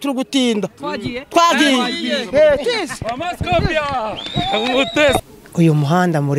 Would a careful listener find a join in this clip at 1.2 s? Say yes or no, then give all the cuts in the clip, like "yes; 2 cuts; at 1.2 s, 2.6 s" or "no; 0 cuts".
no; 1 cut; at 5.3 s